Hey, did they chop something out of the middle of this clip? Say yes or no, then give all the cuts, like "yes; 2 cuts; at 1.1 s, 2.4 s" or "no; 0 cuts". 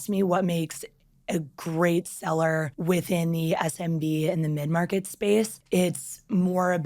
yes; 2 cuts; at 2.7 s, 5.6 s